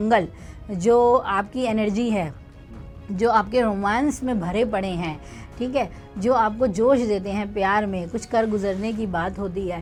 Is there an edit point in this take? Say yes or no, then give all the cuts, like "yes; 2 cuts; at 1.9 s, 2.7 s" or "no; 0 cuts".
no; 0 cuts